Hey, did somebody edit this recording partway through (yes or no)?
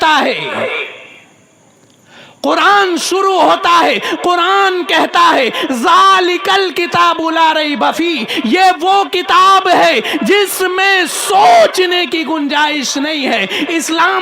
no